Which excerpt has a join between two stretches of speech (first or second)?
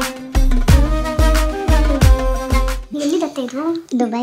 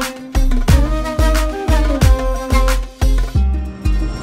first